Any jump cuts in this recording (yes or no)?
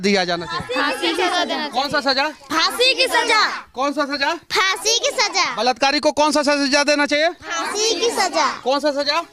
no